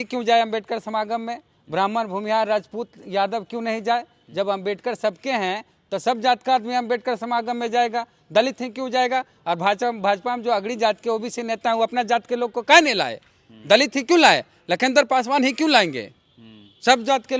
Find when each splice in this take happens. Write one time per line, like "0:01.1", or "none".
none